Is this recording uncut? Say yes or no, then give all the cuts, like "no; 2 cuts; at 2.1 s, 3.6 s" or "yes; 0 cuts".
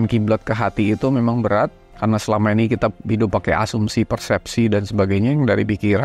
no; 1 cut; at 1.9 s